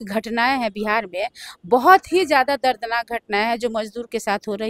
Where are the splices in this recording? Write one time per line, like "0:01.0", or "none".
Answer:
none